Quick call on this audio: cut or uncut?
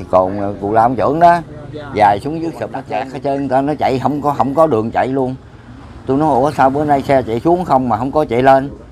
cut